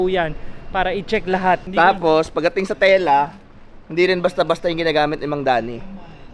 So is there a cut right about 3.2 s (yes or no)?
no